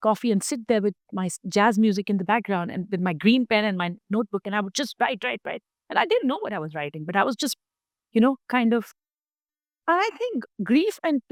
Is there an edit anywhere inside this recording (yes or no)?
no